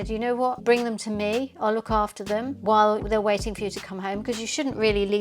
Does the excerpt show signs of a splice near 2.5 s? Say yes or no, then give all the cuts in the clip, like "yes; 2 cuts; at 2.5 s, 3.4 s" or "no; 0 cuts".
yes; 1 cut; at 2.5 s